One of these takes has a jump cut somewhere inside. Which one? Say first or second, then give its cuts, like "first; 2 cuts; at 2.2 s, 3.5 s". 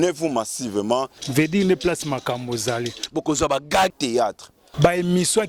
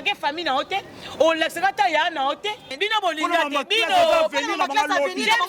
second; 1 cut; at 2.8 s